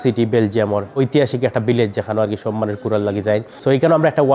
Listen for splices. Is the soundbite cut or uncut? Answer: cut